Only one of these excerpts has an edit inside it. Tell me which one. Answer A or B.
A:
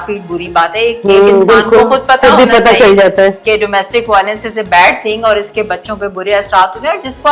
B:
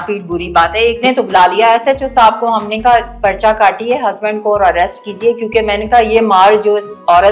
B